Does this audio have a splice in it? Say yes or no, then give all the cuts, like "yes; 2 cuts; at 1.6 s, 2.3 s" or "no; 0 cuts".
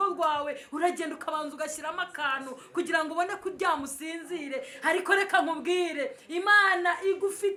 no; 0 cuts